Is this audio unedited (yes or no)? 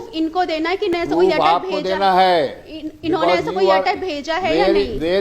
no